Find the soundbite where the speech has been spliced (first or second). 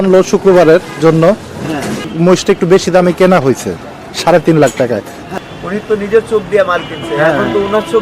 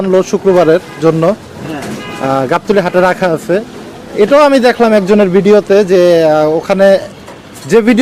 first